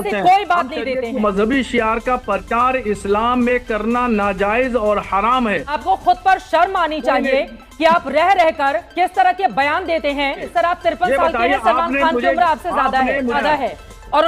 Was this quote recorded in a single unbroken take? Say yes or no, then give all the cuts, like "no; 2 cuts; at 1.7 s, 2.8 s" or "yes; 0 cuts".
no; 4 cuts; at 1.2 s, 5.8 s, 10.4 s, 13.4 s